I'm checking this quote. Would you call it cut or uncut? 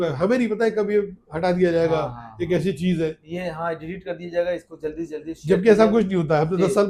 uncut